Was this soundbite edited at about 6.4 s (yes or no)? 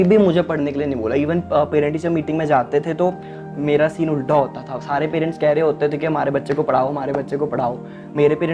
no